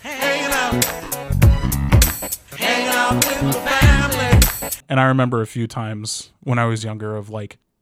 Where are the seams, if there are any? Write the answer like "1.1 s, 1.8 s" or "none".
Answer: 4.8 s